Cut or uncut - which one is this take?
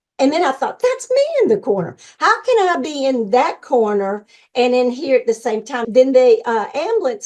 cut